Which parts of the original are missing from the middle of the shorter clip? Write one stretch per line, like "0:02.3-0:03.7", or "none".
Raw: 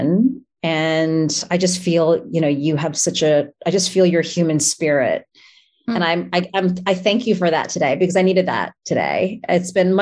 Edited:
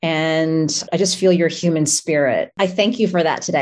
0:01.4-0:03.5
0:05.3-0:06.8